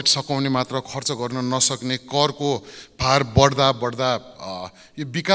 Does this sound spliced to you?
no; 0 cuts

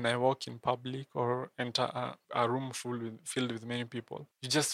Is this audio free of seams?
yes; 0 cuts

